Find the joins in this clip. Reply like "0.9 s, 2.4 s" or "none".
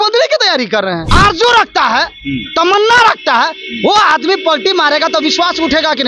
1.0 s